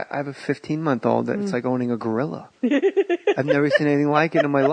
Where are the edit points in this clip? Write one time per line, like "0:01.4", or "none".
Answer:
0:02.1

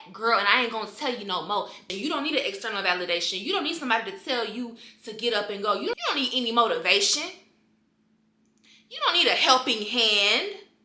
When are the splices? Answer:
0:01.9
0:06.0

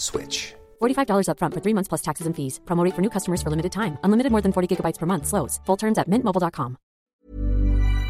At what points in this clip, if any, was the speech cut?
0:07.1

